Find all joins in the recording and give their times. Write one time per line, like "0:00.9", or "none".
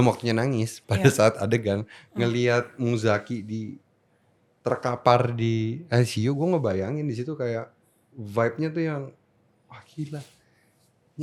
none